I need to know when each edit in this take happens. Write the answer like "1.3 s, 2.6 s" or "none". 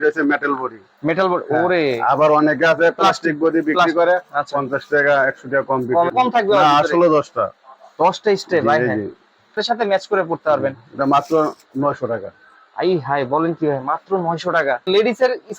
6.1 s, 9.6 s, 14.9 s